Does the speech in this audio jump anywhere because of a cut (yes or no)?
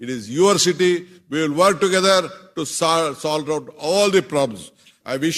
no